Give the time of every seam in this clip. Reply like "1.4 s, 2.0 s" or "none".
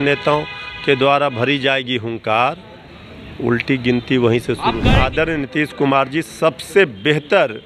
4.8 s

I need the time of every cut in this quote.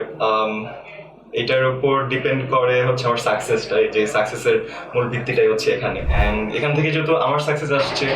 6.1 s

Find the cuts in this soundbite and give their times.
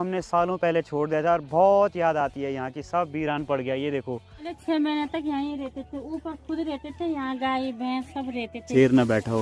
4.5 s, 8.7 s

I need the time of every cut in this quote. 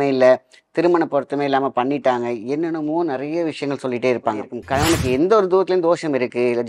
4.6 s

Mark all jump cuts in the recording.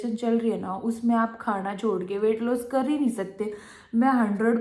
none

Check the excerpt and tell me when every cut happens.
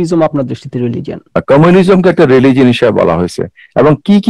1.2 s

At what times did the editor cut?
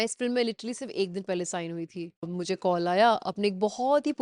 2.3 s

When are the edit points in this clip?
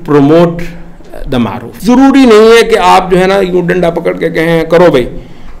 1.7 s

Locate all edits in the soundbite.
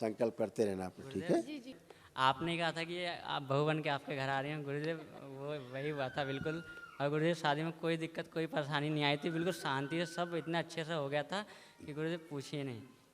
1.8 s

